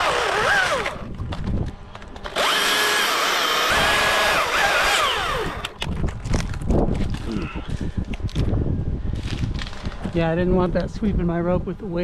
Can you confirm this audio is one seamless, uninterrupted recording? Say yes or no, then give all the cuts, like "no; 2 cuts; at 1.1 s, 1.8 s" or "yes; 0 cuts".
no; 1 cut; at 3.7 s